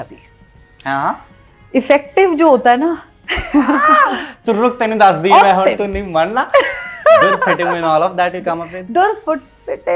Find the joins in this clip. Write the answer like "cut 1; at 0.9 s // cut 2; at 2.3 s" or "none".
none